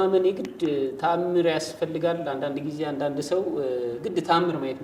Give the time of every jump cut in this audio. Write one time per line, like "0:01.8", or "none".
none

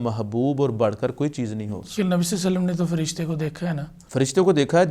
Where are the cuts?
0:01.9
0:03.9

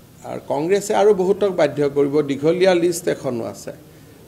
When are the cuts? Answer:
none

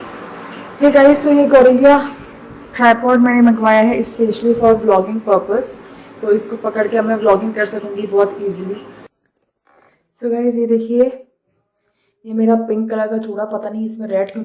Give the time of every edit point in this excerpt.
0:09.2

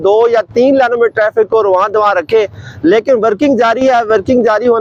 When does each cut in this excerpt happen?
none

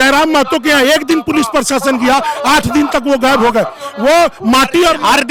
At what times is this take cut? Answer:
none

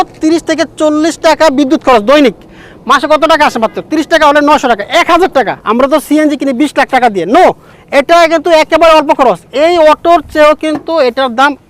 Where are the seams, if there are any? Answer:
0:05.6

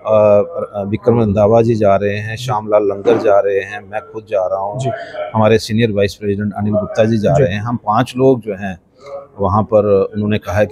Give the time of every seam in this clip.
none

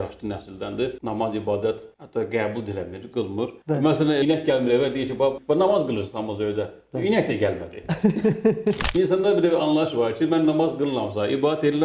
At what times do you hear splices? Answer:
0:03.6
0:04.2
0:05.4
0:08.8

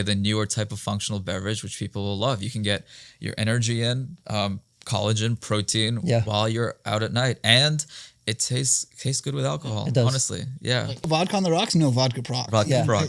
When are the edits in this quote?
0:11.0

